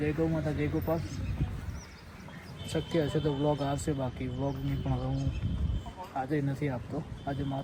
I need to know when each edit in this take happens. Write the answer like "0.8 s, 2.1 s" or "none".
none